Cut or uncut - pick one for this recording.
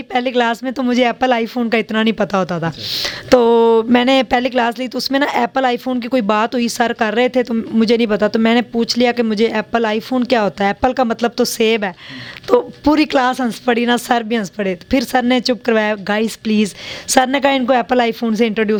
uncut